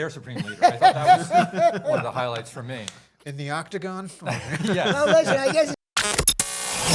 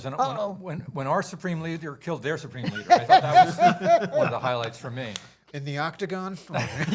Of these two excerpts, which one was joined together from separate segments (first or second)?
first